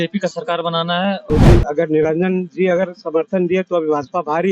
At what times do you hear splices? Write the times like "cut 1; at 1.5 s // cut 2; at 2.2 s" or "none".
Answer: cut 1; at 1.5 s